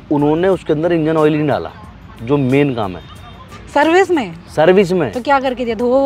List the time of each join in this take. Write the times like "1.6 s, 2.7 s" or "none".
none

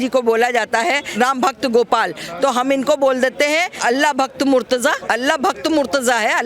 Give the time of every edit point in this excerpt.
1.1 s, 3.7 s, 5.0 s

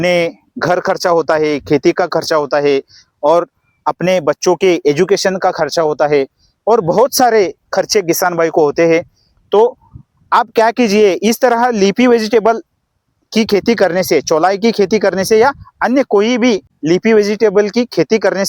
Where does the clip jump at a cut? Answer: 16.7 s

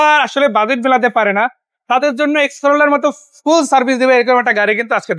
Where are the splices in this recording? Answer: none

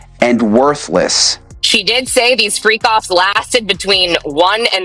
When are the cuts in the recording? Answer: 1.4 s

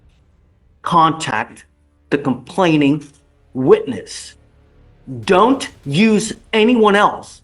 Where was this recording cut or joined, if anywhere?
none

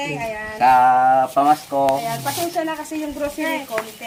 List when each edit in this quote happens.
none

